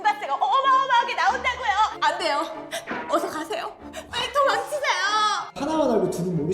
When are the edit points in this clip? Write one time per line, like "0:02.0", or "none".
0:05.6